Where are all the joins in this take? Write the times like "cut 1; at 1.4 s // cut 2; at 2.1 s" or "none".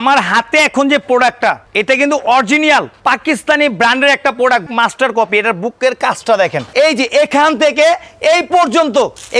cut 1; at 1.7 s // cut 2; at 2.9 s // cut 3; at 4.7 s // cut 4; at 6.6 s